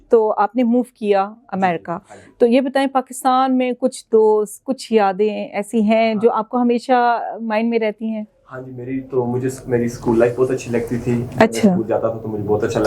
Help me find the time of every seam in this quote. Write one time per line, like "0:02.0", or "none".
none